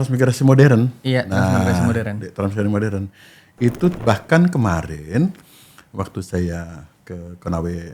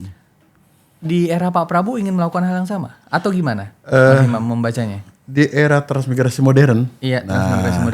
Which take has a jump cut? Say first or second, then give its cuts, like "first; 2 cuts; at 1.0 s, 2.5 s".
first; 1 cut; at 3.9 s